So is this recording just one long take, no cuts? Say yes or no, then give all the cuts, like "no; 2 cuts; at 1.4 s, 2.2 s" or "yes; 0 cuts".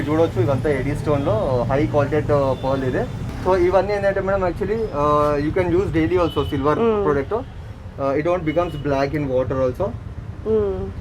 yes; 0 cuts